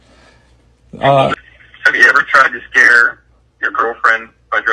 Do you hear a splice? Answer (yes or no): yes